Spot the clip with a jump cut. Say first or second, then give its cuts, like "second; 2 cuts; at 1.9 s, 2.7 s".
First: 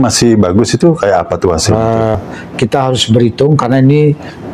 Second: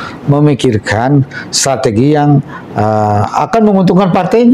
first; 1 cut; at 2.2 s